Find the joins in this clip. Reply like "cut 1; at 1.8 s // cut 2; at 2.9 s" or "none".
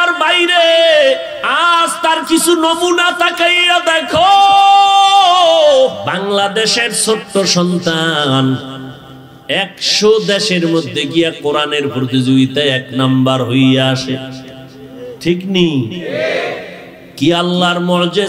cut 1; at 1.4 s // cut 2; at 6.0 s